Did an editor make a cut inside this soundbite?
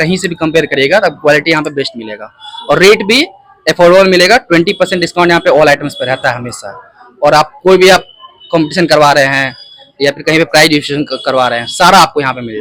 no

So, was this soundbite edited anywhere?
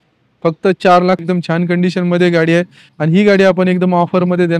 yes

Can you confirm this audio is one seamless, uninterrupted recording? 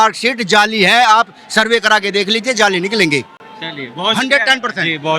yes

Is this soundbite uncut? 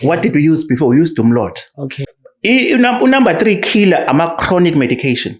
no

